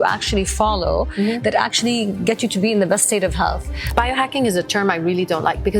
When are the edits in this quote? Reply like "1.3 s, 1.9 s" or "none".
3.9 s